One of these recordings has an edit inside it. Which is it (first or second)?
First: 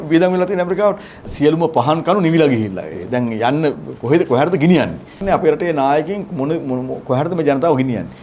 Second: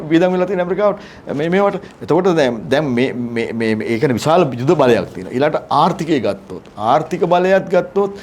first